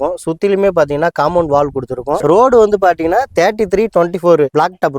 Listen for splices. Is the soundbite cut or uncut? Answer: cut